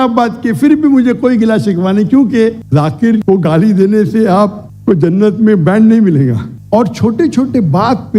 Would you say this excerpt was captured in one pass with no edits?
no; 2 cuts; at 2.6 s, 6.5 s

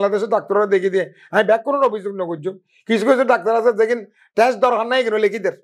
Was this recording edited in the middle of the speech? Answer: no; 0 cuts

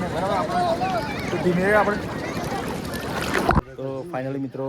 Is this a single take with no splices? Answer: no; 1 cut; at 3.7 s

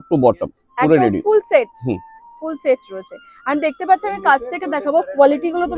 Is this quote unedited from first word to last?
yes; 0 cuts

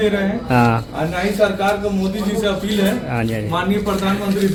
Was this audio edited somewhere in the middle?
no; 0 cuts

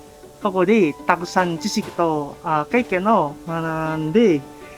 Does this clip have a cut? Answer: yes; 1 cut; at 3.4 s

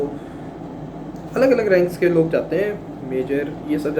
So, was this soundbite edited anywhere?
no; 0 cuts

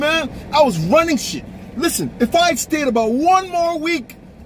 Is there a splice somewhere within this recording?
no; 0 cuts

